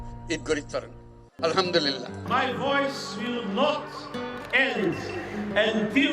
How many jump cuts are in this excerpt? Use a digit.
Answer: 1